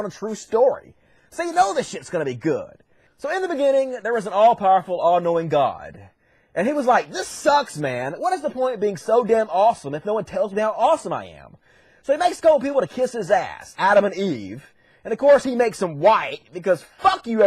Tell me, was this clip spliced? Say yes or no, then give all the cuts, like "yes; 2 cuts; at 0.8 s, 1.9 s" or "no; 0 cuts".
yes; 1 cut; at 7.5 s